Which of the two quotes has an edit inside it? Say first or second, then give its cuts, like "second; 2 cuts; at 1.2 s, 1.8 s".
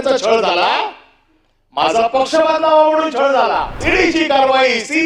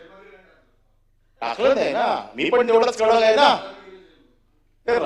first; 1 cut; at 3.8 s